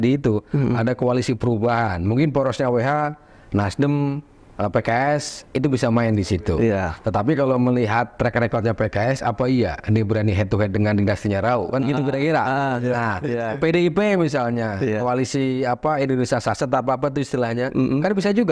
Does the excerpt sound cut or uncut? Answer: uncut